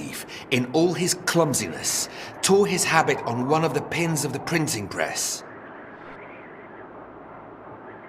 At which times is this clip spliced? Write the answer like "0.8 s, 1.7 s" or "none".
5.2 s